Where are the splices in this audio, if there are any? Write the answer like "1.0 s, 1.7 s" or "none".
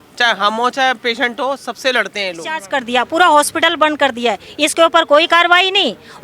2.6 s